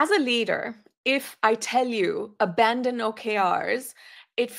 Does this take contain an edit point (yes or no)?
no